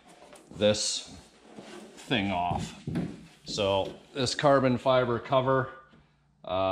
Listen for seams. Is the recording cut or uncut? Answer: uncut